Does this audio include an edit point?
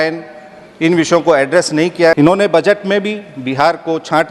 yes; 1 cut; at 2.1 s

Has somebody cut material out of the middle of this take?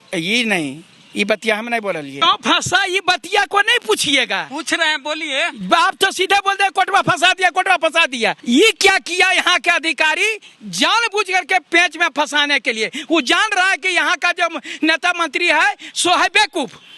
yes; 2 cuts; at 2.2 s, 8.4 s

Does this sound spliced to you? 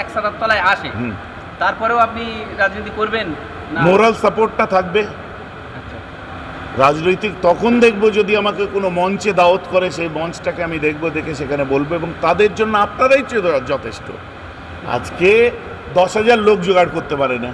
no; 0 cuts

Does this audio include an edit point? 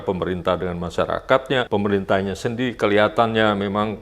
yes; 1 cut; at 1.7 s

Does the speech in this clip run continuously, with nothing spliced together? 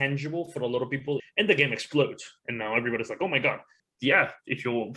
no; 2 cuts; at 1.3 s, 3.7 s

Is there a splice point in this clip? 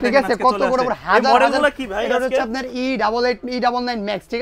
no; 0 cuts

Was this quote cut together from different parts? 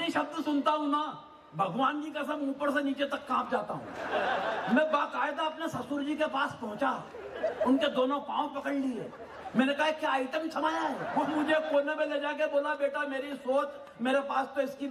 yes; 2 cuts; at 4.2 s, 11.0 s

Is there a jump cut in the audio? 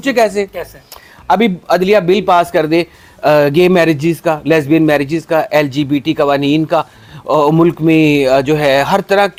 no; 0 cuts

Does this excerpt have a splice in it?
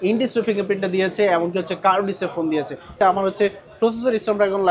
yes; 1 cut; at 3.0 s

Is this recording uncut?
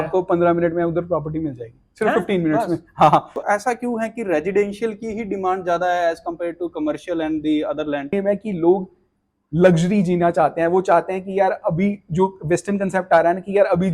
no; 2 cuts; at 3.3 s, 8.1 s

